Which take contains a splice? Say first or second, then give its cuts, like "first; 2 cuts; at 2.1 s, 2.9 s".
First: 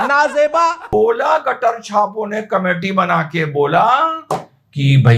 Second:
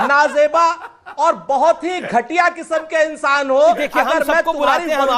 first; 1 cut; at 0.9 s